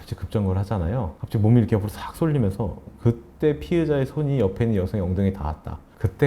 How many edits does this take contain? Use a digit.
1